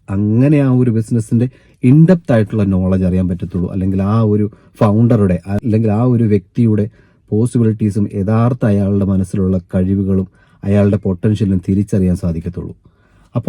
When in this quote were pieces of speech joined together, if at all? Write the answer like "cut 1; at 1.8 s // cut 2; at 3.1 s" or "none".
cut 1; at 5.6 s